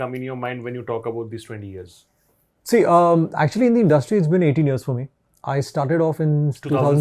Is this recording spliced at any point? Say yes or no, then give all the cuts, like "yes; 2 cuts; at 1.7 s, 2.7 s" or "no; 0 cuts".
no; 0 cuts